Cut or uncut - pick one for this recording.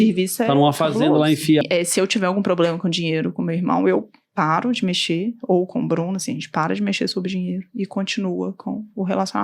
cut